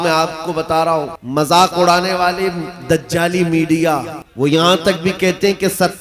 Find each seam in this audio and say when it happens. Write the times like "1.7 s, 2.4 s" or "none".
1.2 s, 4.2 s